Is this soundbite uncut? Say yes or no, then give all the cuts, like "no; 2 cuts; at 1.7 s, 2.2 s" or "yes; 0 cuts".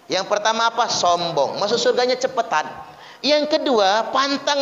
yes; 0 cuts